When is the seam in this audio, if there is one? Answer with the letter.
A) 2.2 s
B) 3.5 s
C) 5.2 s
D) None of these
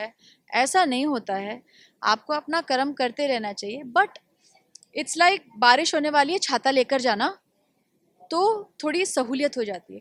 D